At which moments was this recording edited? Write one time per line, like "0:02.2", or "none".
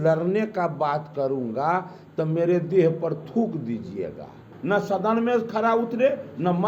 0:04.5